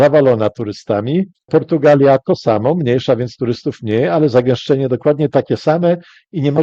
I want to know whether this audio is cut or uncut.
uncut